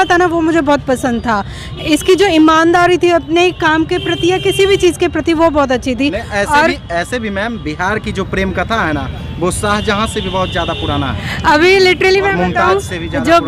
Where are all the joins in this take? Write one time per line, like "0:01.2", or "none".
none